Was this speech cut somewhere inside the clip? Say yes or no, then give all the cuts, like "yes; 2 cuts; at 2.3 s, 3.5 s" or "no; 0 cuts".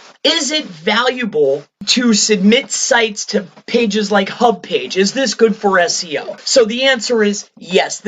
yes; 2 cuts; at 1.8 s, 6.4 s